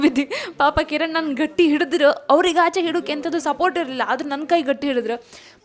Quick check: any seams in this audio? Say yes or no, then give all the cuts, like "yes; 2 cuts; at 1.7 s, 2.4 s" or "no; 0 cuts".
no; 0 cuts